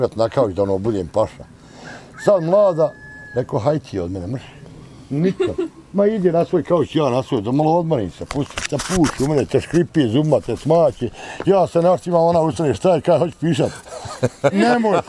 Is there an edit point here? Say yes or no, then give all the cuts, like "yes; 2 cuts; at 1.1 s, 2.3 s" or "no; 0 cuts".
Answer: no; 0 cuts